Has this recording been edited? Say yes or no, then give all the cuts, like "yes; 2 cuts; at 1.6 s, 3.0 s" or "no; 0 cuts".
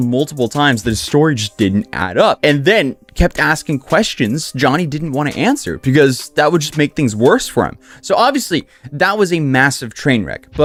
no; 0 cuts